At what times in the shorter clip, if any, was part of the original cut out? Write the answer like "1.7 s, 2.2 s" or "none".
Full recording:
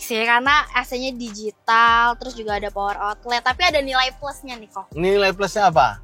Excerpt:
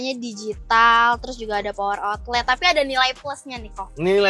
none